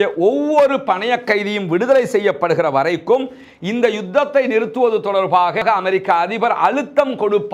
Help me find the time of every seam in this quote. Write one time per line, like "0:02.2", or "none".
none